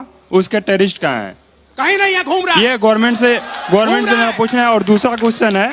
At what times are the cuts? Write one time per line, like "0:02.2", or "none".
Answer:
none